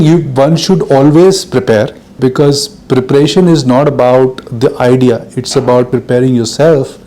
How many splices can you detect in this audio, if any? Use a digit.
2